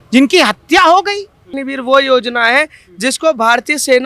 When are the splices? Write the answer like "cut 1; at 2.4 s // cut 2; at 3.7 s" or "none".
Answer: cut 1; at 1.5 s